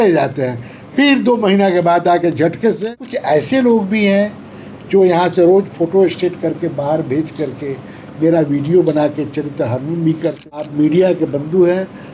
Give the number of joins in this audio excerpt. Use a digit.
2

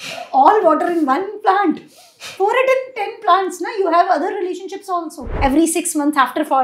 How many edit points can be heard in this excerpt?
1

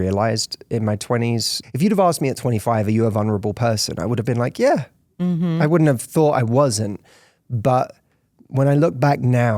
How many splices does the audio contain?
1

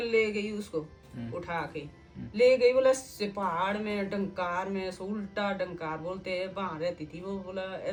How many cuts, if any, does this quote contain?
0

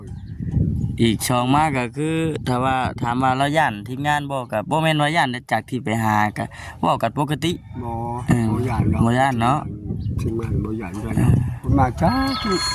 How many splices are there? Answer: 1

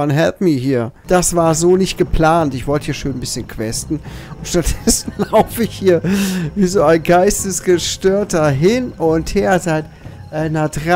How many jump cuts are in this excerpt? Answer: 1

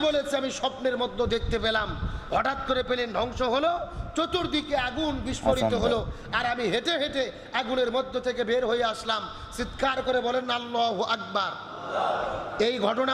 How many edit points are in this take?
0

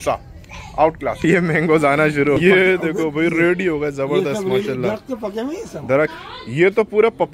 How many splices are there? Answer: 2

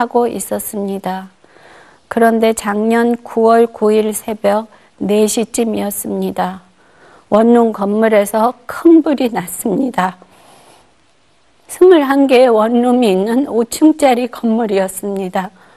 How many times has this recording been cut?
1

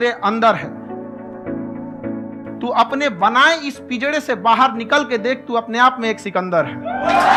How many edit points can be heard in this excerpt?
0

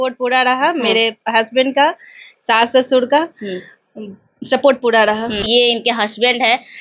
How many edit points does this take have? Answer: 1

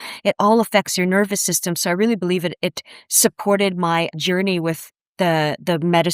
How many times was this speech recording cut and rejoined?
1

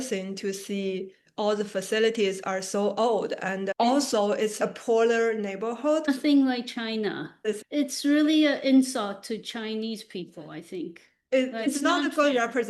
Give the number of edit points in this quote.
2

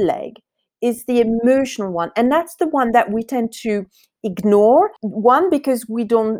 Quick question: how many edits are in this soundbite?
1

